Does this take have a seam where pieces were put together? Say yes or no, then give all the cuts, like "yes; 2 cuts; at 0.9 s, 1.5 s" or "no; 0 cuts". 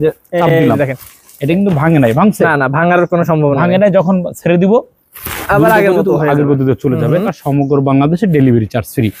yes; 1 cut; at 7.4 s